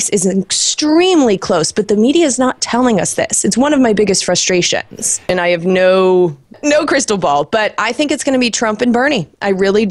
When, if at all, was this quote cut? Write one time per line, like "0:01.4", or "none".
0:05.3
0:06.5